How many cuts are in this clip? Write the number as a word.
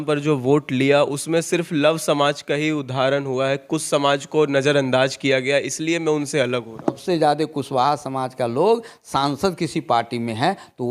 one